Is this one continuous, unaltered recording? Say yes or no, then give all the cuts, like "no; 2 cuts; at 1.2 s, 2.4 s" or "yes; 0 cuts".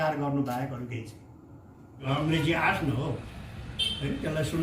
no; 1 cut; at 2.1 s